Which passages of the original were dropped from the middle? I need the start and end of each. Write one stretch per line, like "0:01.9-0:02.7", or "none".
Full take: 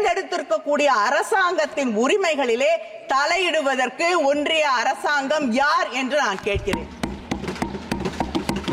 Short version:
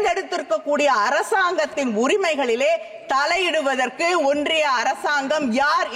none